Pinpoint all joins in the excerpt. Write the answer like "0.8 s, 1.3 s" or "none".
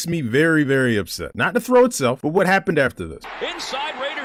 none